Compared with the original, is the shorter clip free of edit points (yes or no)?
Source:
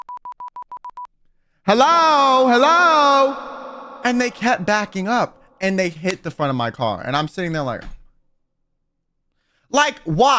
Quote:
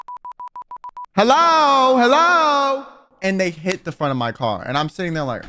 no